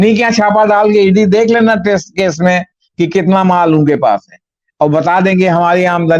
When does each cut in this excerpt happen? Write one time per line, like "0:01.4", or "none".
none